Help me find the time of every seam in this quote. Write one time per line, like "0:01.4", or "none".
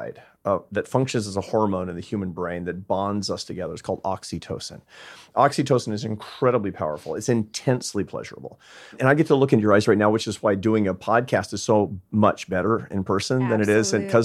0:09.0